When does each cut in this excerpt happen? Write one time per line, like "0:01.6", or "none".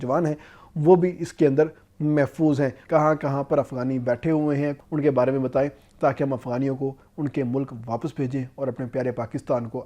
0:02.8
0:04.8

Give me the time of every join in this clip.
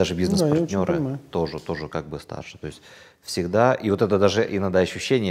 none

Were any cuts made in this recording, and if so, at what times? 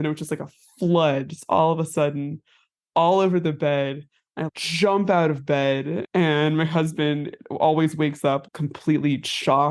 0:04.4
0:06.0

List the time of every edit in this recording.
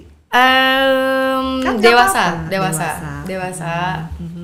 none

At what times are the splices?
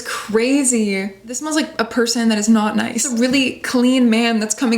0:01.4
0:03.0

